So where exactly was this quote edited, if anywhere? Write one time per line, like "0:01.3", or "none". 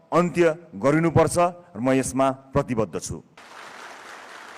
0:03.4

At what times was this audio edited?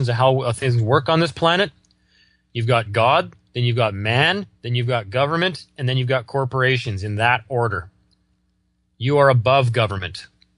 0:05.1

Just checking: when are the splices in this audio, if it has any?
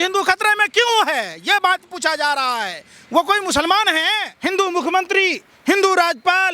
0:04.3

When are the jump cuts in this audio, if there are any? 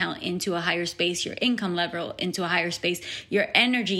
none

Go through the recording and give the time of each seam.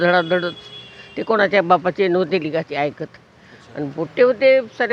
none

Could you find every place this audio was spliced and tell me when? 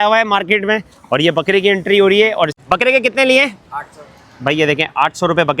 0:02.6

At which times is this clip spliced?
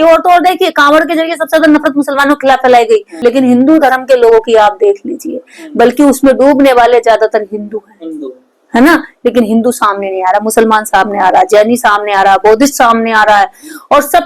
0:03.1

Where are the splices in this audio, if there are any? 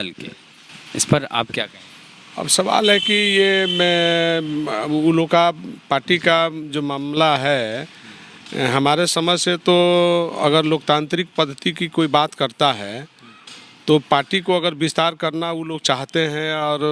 none

